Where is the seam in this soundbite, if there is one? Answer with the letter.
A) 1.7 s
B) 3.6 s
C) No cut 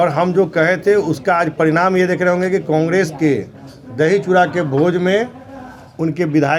C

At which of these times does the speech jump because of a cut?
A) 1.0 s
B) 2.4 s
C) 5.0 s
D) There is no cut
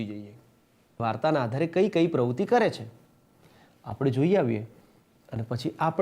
A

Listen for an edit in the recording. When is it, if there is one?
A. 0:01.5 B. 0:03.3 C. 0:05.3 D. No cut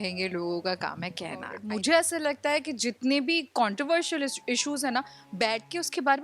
A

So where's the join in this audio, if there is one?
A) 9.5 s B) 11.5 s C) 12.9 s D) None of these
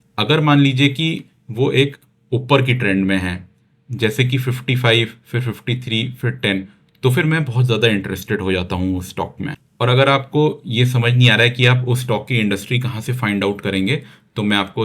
A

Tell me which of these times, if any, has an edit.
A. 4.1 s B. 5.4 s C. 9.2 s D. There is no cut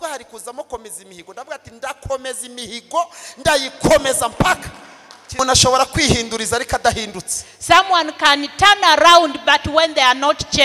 B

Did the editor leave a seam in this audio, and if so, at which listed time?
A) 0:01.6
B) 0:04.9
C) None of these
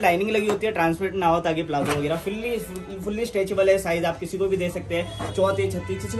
C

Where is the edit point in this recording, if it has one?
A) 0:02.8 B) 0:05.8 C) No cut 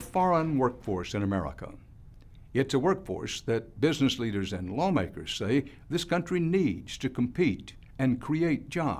A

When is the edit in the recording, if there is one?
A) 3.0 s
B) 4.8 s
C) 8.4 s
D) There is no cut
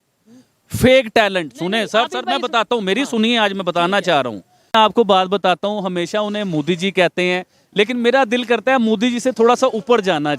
B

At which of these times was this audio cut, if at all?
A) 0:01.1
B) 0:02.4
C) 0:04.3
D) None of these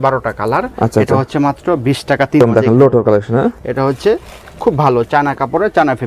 B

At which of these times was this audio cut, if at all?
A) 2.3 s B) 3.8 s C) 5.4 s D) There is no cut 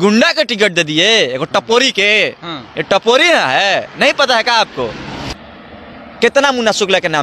C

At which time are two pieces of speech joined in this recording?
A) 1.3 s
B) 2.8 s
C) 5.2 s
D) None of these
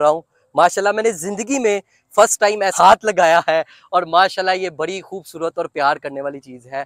D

